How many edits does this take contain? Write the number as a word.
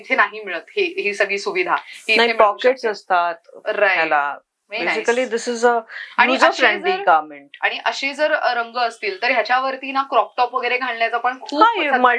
zero